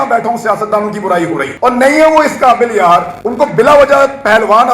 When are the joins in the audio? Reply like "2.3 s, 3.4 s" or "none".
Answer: 1.5 s, 3.2 s